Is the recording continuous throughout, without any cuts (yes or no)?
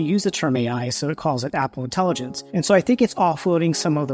no